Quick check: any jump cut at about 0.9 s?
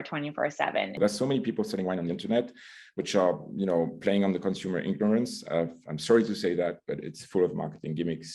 yes; 1 cut; at 0.9 s

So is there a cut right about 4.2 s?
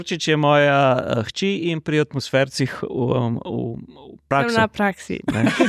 yes; 1 cut; at 4.2 s

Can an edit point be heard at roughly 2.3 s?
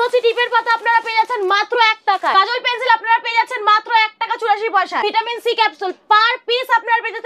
yes; 2 cuts; at 2.3 s, 5.0 s

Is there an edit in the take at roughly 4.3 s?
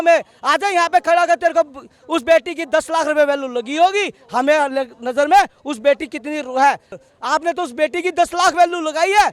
no; 1 cut; at 6.9 s

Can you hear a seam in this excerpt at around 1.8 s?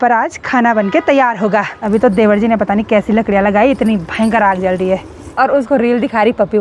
yes; 2 cuts; at 1.8 s, 5.2 s

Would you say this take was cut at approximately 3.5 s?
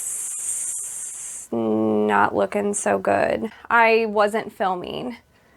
yes; 1 cut; at 3.5 s

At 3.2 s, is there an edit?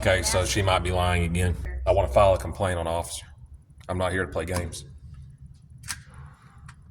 no; 1 cut; at 1.7 s

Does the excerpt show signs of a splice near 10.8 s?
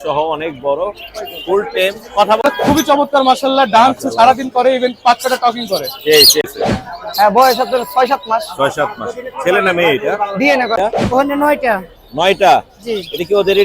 yes; 3 cuts; at 2.4 s, 6.5 s, 10.8 s

